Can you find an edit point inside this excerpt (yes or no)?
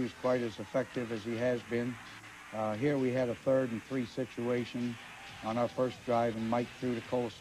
no